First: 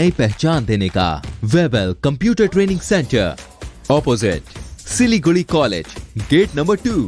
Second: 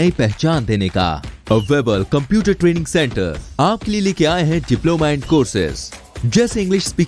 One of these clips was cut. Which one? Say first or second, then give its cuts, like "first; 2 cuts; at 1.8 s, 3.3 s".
first; 1 cut; at 1.3 s